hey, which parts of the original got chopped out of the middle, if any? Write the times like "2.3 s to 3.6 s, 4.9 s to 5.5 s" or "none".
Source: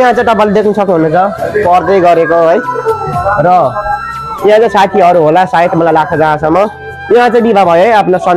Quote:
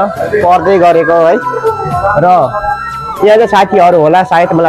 none

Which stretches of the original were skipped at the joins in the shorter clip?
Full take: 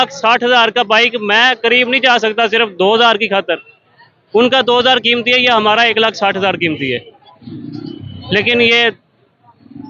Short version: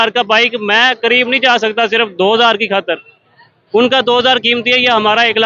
none

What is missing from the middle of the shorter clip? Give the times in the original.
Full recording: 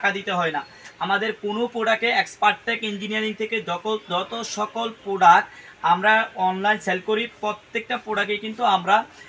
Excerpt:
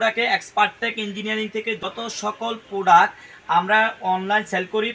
3.7 s to 4.2 s

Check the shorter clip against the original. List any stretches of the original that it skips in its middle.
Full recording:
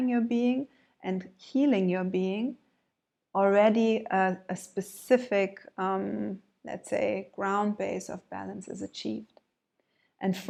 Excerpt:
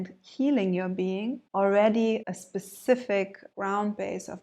2.6 s to 3.2 s, 4.0 s to 4.5 s, 5.7 s to 7.3 s

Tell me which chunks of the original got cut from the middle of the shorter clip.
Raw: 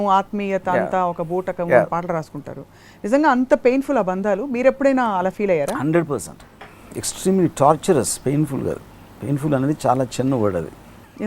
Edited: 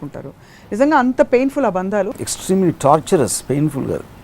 4.5 s to 6.9 s

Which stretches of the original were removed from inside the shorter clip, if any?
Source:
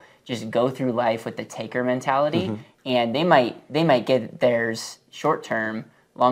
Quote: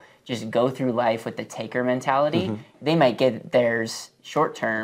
2.7 s to 3.6 s

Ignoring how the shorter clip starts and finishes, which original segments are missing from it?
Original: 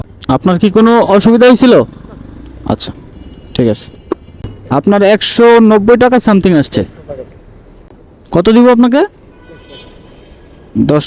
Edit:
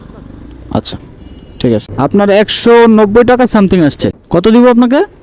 3.8 s to 4.6 s, 6.9 s to 8.1 s

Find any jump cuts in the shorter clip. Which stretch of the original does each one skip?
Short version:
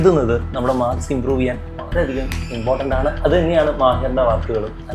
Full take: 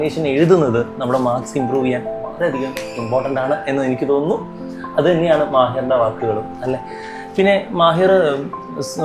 3.6 s to 4.9 s

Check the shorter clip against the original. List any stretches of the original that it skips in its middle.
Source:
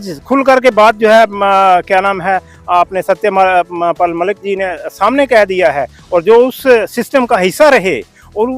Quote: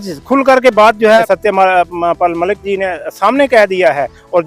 1.2 s to 3.0 s

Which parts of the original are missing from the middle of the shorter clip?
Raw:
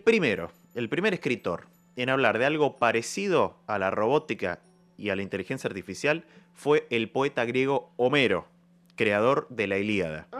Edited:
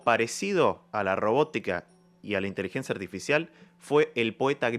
none

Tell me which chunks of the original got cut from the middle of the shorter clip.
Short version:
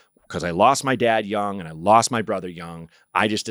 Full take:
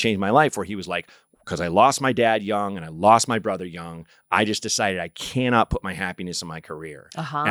none

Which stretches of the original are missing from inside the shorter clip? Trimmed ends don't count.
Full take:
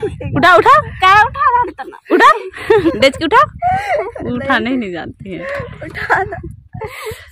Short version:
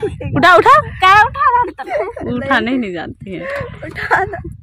1.9 s to 3.9 s

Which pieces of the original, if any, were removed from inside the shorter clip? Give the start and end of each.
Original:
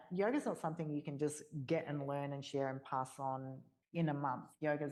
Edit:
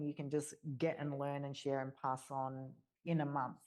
none

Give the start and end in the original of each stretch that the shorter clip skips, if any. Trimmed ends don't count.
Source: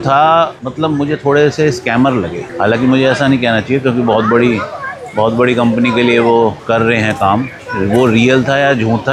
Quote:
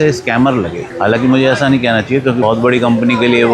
4.0 s to 5.1 s

